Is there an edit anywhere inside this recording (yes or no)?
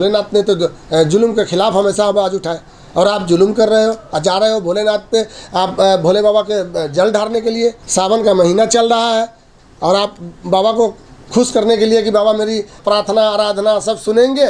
yes